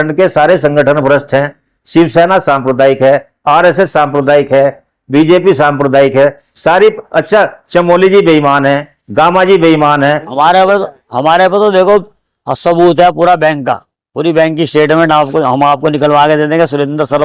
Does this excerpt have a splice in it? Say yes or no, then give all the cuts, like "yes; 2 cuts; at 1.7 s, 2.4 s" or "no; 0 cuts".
yes; 2 cuts; at 1.8 s, 10.3 s